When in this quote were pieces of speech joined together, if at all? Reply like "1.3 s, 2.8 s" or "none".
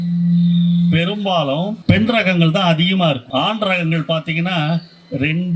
1.8 s, 3.2 s